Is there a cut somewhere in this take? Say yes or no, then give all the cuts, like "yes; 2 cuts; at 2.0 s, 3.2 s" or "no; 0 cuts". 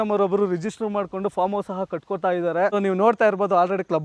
yes; 1 cut; at 2.7 s